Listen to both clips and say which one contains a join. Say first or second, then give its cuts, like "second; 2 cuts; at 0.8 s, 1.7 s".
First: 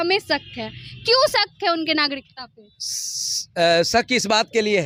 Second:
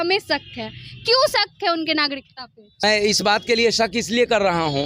second; 1 cut; at 2.8 s